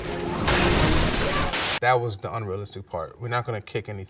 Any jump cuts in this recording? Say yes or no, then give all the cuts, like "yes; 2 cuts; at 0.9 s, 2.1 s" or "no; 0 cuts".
yes; 1 cut; at 1.2 s